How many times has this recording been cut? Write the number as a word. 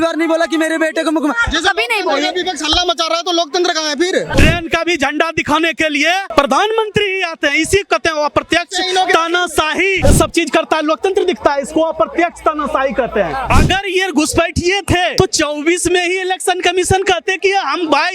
five